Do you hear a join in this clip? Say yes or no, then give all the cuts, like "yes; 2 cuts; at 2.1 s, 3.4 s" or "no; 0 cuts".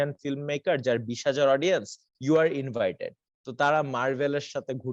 no; 0 cuts